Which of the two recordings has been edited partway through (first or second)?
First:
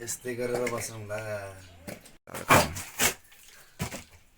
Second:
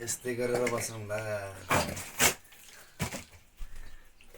second